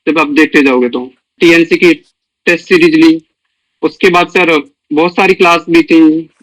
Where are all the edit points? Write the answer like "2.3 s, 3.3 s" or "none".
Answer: 1.3 s

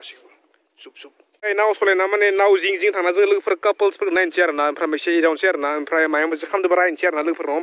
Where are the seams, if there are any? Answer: 1.5 s

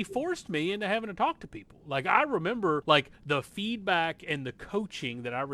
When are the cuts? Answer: 2.8 s

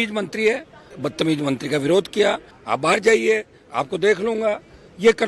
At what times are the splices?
0.9 s, 2.5 s

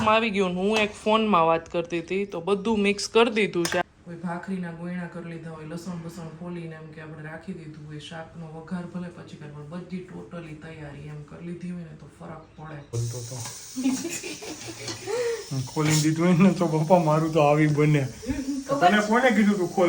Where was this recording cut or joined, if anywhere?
3.8 s, 12.9 s

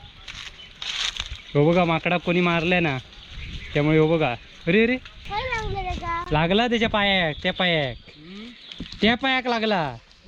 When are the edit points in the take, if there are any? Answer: 5.2 s

